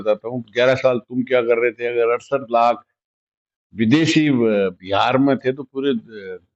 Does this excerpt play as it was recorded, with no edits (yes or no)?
yes